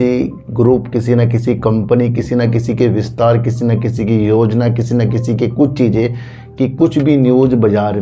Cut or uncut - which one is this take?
uncut